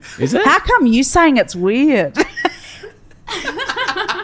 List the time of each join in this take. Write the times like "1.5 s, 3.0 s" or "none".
none